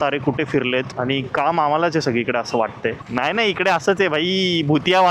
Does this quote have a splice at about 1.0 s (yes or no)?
no